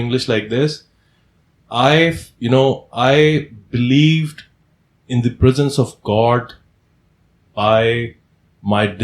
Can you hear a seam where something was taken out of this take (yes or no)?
no